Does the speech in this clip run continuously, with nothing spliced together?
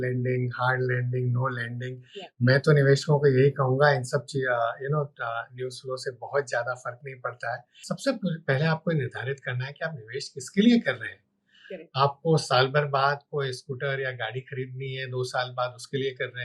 no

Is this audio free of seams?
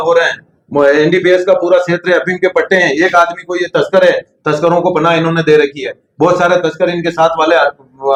yes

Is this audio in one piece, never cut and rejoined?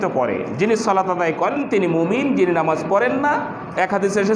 yes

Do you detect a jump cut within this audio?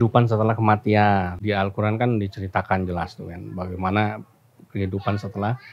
yes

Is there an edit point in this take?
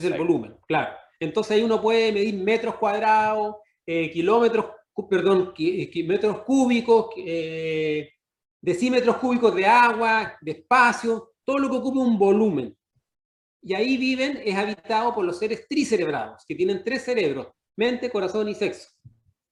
no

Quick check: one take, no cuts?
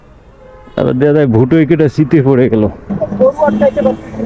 no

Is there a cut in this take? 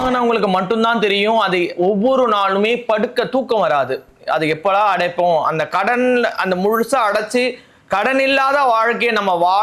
no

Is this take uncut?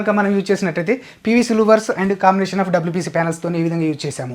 yes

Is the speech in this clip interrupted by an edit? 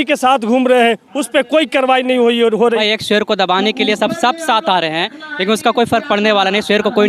yes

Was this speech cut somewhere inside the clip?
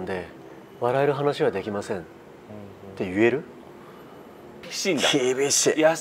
yes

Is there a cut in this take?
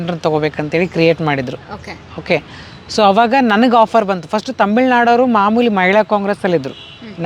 no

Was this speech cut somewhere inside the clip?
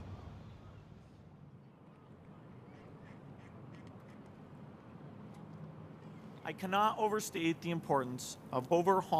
yes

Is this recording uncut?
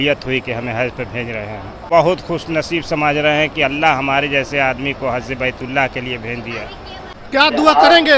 no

